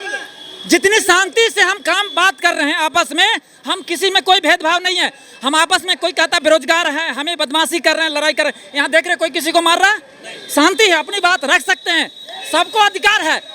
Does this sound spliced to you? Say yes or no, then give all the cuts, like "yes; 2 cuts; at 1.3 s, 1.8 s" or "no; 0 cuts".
no; 0 cuts